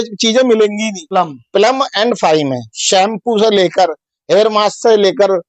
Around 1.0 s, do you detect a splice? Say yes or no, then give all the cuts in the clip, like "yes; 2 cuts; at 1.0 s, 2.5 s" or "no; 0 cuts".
yes; 1 cut; at 1.0 s